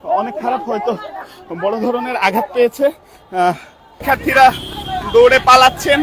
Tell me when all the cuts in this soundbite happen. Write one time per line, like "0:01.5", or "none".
0:03.9